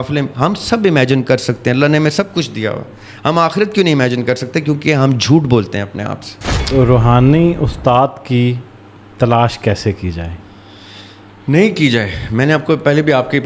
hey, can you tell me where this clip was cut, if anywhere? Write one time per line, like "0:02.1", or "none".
0:06.6